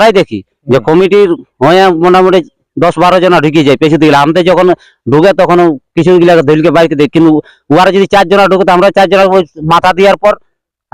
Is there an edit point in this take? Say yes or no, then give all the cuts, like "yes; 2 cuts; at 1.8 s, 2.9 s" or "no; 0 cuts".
no; 0 cuts